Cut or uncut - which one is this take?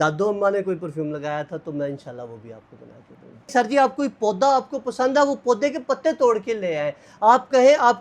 cut